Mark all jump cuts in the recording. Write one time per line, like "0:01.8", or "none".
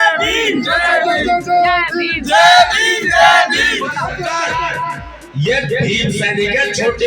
0:04.2